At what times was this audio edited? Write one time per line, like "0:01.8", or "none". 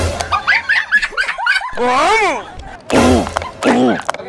none